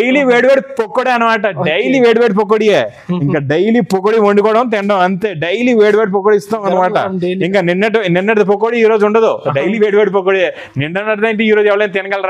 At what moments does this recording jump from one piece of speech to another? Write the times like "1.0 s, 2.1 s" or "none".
none